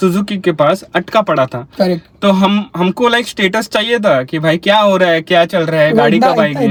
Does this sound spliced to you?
no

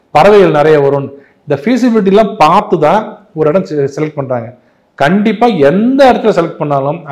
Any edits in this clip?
no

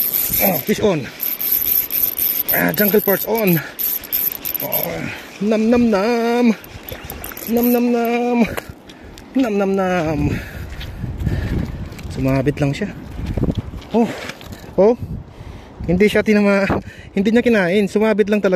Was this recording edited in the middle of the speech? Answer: no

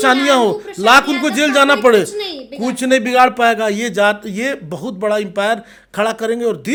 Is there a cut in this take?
no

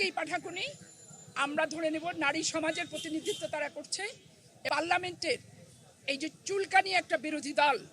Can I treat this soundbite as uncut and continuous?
no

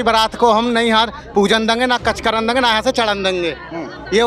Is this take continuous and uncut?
yes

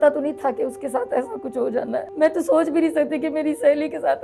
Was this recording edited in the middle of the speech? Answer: yes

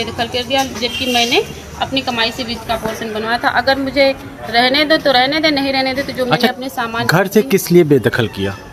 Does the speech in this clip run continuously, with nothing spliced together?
yes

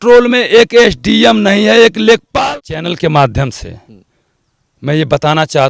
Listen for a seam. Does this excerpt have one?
yes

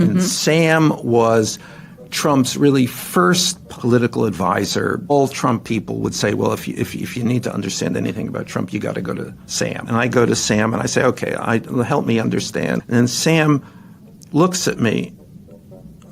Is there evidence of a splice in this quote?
yes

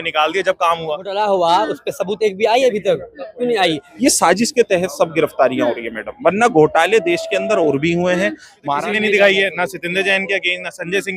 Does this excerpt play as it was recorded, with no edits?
no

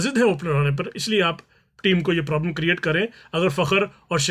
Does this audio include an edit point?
no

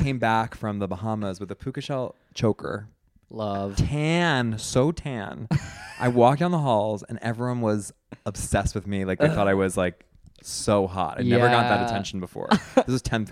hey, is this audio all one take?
yes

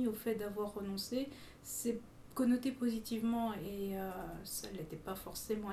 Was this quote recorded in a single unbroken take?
no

